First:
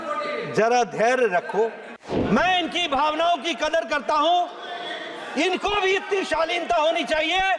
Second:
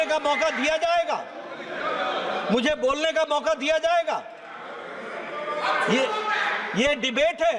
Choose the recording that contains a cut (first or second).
first